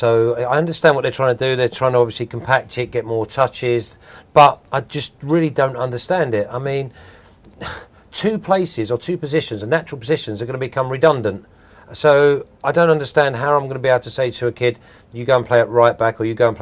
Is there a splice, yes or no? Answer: yes